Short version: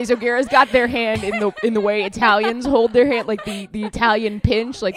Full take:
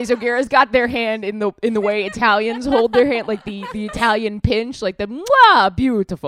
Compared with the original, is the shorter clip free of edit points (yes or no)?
yes